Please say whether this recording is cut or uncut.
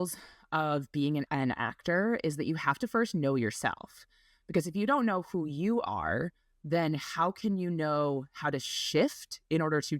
cut